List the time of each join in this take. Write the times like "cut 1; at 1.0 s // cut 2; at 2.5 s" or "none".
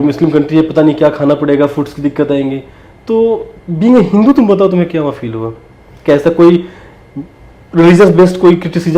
none